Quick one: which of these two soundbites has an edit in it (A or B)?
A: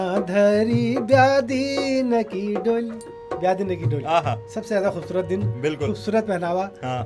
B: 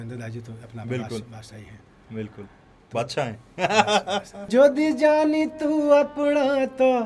B